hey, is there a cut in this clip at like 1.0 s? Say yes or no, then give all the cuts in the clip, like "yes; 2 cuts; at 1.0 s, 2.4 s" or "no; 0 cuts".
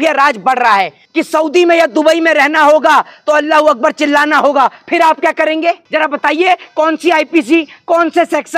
yes; 2 cuts; at 1.0 s, 5.8 s